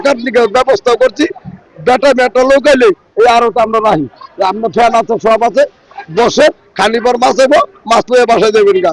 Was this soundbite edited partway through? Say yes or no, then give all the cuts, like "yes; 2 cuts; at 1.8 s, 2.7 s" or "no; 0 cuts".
no; 0 cuts